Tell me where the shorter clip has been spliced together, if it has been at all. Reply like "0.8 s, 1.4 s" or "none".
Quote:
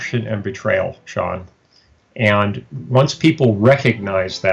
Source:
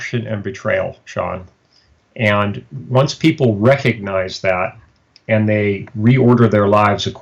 none